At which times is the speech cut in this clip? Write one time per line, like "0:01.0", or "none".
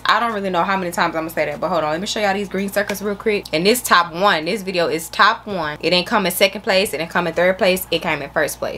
none